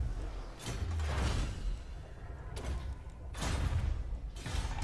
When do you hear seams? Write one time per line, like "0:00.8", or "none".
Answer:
0:03.8